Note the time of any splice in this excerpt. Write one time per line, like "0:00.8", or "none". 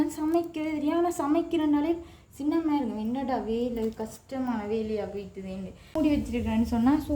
0:06.0